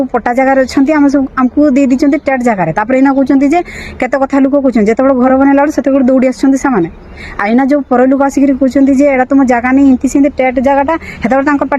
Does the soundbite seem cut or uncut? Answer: uncut